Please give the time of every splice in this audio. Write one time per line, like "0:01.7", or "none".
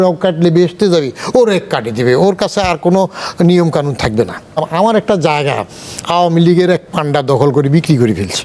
0:04.6